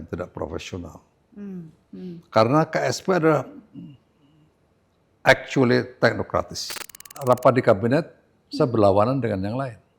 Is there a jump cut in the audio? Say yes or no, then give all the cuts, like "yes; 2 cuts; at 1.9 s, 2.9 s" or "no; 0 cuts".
yes; 1 cut; at 7.1 s